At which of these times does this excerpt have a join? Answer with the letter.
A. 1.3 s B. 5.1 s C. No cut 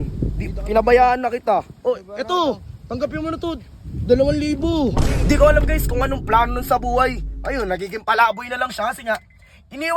B